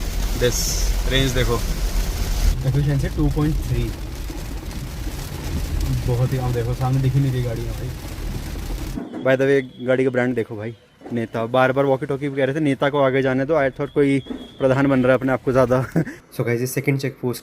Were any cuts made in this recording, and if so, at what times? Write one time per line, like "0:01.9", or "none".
0:02.4
0:08.8
0:16.2